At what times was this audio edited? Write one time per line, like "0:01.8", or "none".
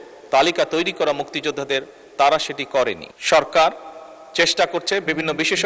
0:03.1